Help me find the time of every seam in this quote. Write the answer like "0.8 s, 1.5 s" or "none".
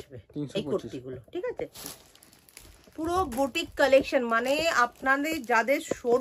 1.8 s